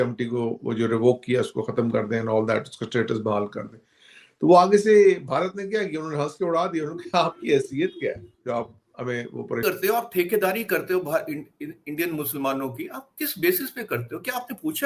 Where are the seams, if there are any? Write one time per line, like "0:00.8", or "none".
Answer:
0:09.6